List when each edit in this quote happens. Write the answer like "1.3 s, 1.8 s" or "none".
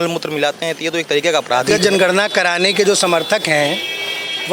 1.7 s